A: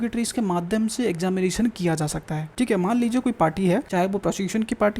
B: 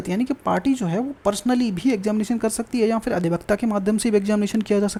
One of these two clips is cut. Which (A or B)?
A